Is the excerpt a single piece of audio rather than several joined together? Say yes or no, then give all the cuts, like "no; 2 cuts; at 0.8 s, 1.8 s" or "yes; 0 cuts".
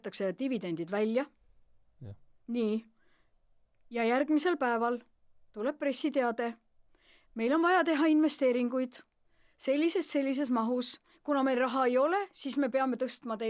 yes; 0 cuts